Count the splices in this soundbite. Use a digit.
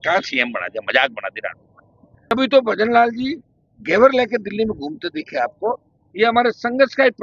1